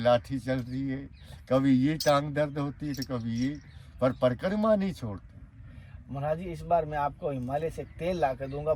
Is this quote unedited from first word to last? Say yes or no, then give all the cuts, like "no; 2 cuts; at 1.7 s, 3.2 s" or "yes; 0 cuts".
yes; 0 cuts